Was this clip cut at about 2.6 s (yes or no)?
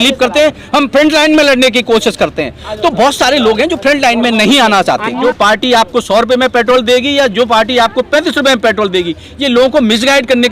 no